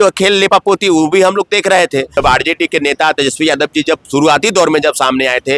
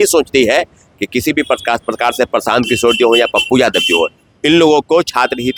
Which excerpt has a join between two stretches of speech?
first; 1 cut; at 2.1 s

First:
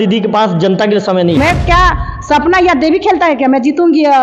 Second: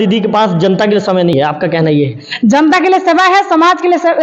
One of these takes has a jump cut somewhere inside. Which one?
first; 1 cut; at 1.4 s

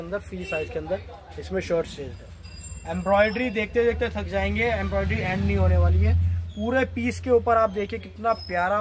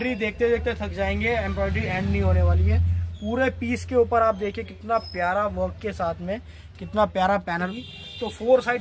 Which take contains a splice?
second; 1 cut; at 7.7 s

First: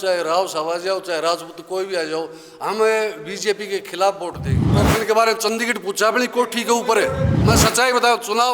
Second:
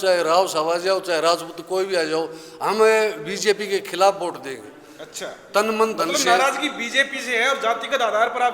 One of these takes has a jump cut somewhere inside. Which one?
first; 2 cuts; at 4.7 s, 7.3 s

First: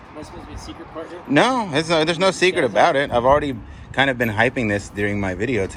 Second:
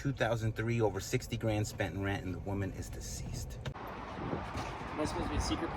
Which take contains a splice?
second; 1 cut; at 3.7 s

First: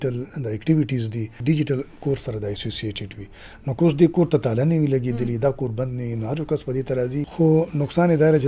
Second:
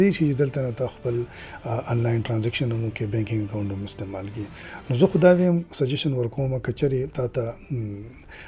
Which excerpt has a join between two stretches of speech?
first; 2 cuts; at 1.4 s, 7.3 s

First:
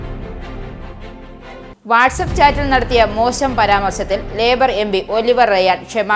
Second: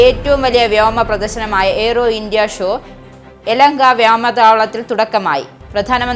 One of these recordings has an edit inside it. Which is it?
first; 1 cut; at 1.7 s

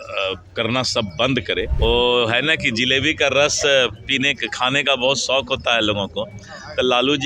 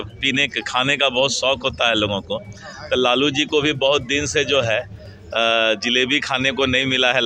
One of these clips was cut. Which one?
first; 1 cut; at 1.7 s

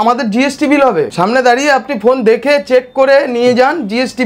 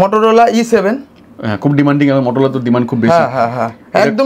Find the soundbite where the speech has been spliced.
first; 1 cut; at 1.1 s

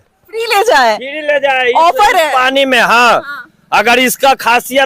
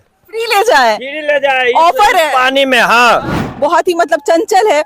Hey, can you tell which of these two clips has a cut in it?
second; 1 cut; at 3.4 s

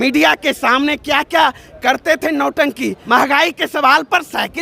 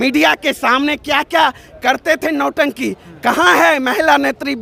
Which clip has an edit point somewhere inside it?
first; 1 cut; at 3.0 s

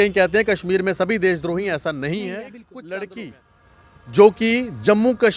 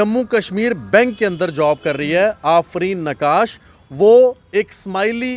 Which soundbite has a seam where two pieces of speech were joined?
first; 1 cut; at 2.6 s

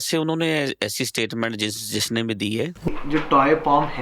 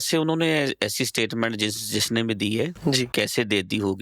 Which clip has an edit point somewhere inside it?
first; 1 cut; at 2.9 s

